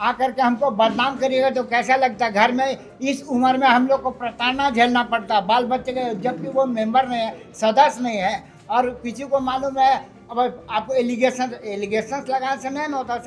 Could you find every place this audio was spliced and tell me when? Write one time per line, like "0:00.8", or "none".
none